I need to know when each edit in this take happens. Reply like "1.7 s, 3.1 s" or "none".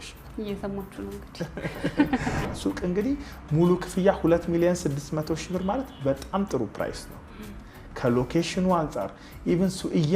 2.5 s